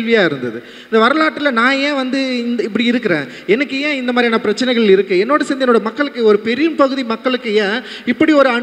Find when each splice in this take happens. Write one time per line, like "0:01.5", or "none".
none